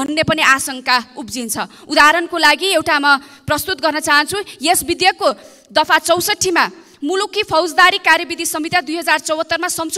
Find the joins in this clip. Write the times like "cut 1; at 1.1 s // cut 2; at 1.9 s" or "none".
none